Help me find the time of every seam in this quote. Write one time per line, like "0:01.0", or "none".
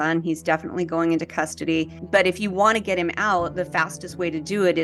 0:02.0